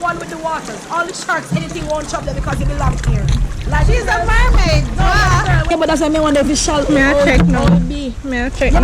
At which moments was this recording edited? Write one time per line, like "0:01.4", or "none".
0:05.7